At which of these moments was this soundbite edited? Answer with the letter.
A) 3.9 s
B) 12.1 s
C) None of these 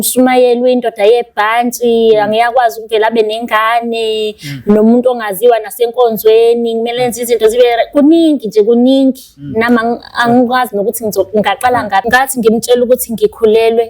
B